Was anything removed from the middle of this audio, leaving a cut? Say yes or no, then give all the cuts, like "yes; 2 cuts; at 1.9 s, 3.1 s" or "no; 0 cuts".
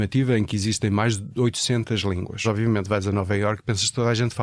yes; 1 cut; at 2.4 s